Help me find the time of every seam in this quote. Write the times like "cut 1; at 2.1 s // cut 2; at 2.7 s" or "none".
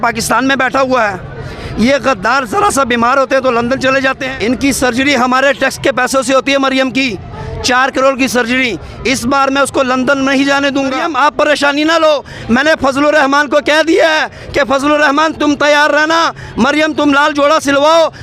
cut 1; at 4.2 s // cut 2; at 11.0 s